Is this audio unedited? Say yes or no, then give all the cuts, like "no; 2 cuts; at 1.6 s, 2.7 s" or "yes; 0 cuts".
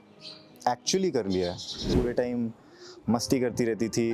no; 1 cut; at 1.9 s